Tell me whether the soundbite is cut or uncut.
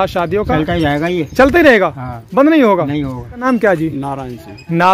cut